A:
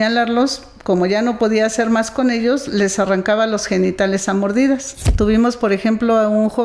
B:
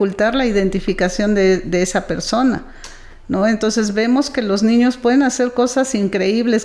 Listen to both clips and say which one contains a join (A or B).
A